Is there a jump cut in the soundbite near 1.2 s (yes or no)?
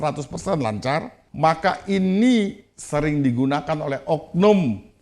yes